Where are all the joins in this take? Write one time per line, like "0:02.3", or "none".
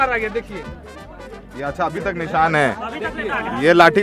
none